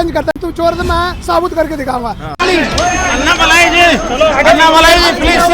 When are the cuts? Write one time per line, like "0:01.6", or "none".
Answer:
0:02.4